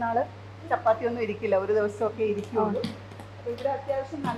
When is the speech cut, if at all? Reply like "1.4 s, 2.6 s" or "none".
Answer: none

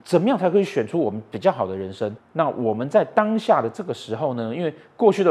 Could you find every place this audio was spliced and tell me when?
2.1 s

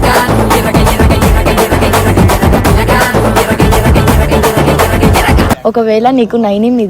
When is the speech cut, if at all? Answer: 5.6 s

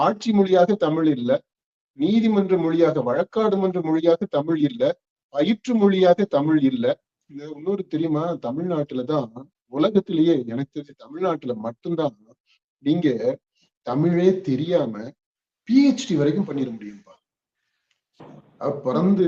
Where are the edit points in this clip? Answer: none

